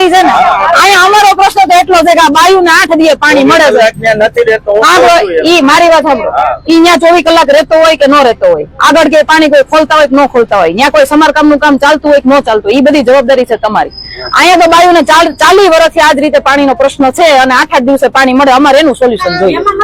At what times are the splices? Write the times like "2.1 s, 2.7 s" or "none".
none